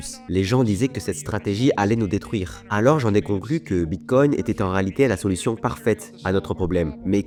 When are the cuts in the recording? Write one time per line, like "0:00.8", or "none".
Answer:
none